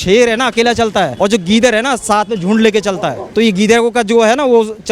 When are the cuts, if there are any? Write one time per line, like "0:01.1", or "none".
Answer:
0:01.1
0:03.2